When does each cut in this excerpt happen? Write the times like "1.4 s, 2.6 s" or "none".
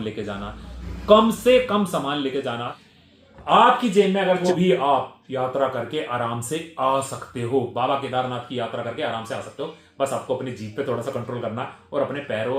2.8 s, 4.4 s